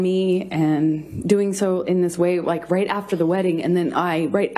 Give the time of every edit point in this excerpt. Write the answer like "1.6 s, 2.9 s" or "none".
none